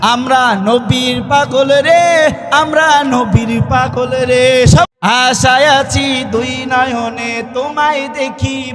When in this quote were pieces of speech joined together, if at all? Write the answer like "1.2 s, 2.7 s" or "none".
4.9 s